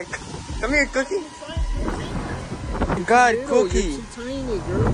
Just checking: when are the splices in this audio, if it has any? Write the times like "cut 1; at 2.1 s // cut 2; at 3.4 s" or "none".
cut 1; at 3.0 s